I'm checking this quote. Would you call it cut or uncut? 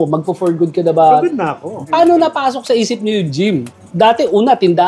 cut